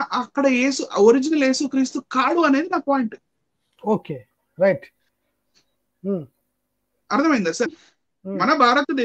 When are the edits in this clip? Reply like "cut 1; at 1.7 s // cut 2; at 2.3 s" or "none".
cut 1; at 7.8 s